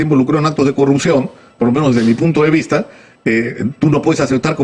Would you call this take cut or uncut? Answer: uncut